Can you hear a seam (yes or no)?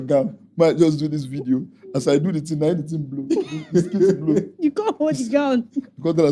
no